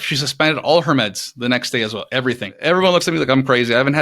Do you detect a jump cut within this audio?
yes; 1 cut; at 2.6 s

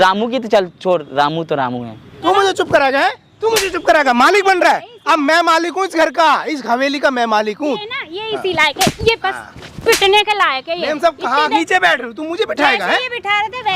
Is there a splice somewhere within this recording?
yes; 2 cuts; at 2.1 s, 11.5 s

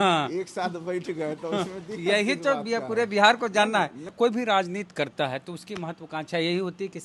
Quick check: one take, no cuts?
no; 1 cut; at 4.1 s

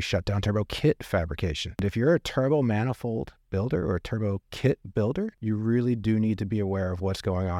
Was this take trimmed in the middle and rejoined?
yes; 2 cuts; at 1.7 s, 5.4 s

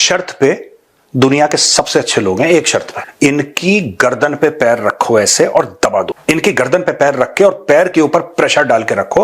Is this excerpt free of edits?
no; 2 cuts; at 3.0 s, 6.1 s

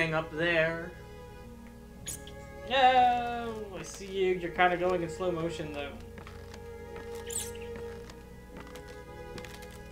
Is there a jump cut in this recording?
no; 0 cuts

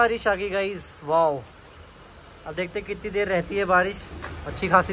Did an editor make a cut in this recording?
yes; 1 cut; at 1.9 s

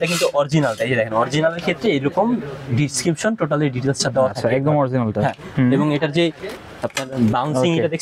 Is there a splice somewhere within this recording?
yes; 1 cut; at 5.5 s

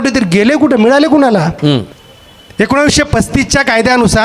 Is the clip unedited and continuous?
no; 1 cut; at 2.0 s

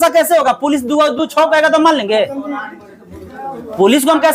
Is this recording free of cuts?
yes; 0 cuts

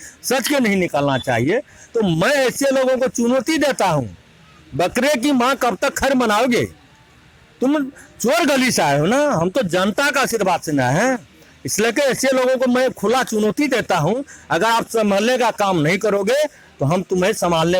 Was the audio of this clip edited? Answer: no; 0 cuts

